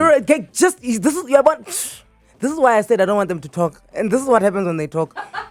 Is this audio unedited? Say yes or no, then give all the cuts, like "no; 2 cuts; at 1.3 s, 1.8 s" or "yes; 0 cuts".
yes; 0 cuts